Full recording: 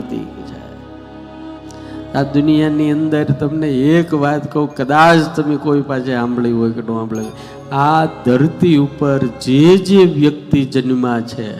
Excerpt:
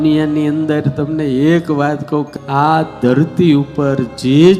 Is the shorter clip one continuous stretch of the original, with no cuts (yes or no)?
no